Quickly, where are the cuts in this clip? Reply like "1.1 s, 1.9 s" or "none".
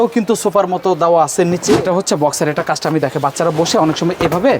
1.7 s